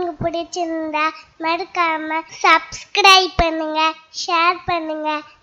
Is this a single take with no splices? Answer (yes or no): no